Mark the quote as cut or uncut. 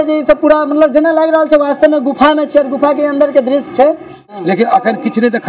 cut